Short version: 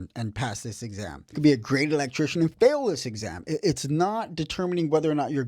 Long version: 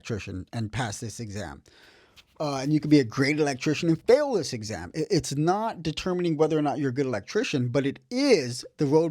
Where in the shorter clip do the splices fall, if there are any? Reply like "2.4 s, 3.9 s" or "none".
1.3 s